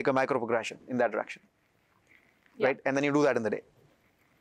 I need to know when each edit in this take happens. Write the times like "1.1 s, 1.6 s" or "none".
none

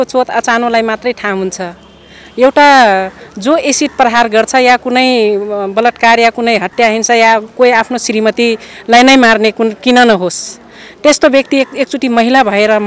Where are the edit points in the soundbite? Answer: none

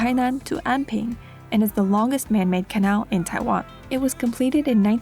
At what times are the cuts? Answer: 3.8 s

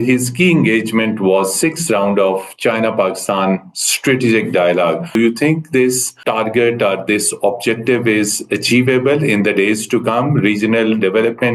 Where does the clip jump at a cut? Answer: 5.2 s, 6.1 s

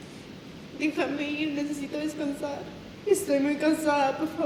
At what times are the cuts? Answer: 2.8 s

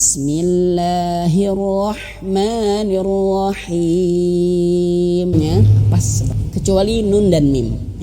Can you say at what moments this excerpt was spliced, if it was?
5.3 s

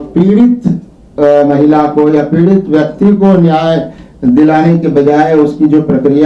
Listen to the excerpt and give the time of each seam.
none

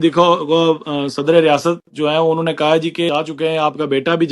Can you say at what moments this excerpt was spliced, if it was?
3.1 s

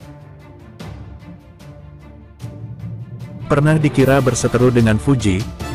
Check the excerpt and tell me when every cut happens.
3.5 s

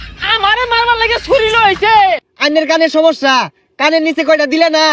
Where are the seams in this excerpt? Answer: 2.3 s

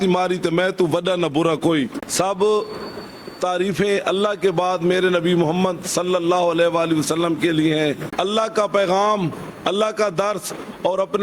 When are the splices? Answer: 2.0 s, 8.1 s

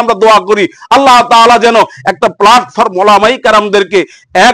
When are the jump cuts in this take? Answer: none

